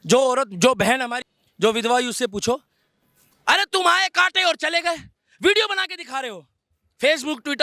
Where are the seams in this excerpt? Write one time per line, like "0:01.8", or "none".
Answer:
0:01.3